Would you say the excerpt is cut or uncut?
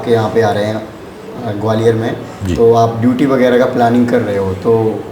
uncut